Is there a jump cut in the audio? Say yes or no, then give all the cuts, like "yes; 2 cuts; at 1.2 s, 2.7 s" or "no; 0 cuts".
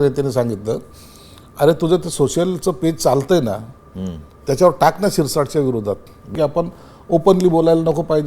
yes; 1 cut; at 6.3 s